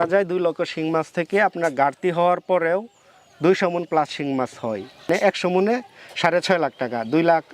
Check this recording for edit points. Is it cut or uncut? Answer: cut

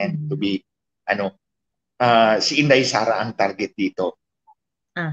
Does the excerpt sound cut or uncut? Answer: uncut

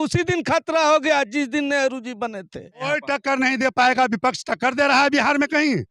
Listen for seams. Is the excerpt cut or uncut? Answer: cut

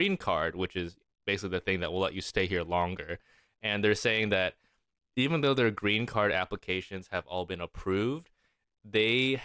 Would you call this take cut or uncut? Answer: uncut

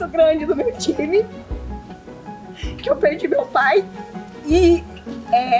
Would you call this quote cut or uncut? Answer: uncut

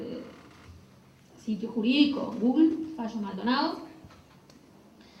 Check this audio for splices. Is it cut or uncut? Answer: cut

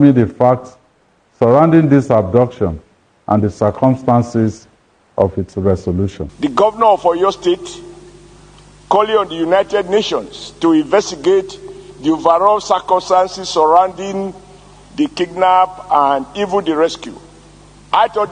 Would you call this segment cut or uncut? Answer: cut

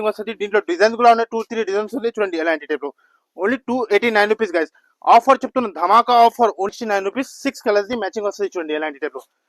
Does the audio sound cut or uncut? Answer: cut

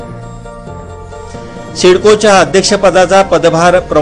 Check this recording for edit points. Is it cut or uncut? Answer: cut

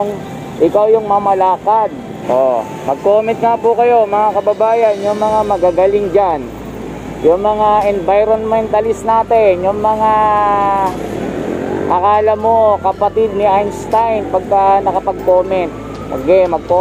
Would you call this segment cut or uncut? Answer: cut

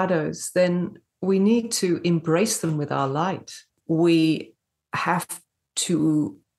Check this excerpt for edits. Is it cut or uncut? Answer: cut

